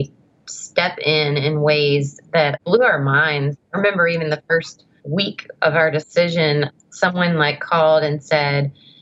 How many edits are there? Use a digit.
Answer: 0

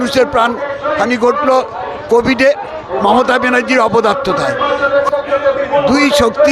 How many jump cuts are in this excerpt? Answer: 1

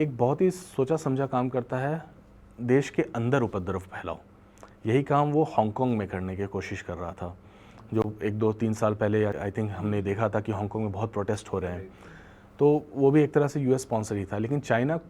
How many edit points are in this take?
0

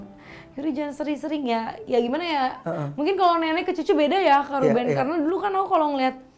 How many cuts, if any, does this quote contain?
0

